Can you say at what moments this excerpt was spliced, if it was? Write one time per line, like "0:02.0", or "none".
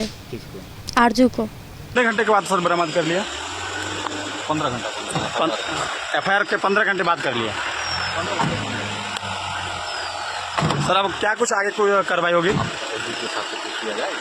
0:01.9